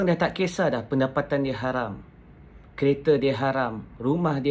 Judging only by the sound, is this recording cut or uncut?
uncut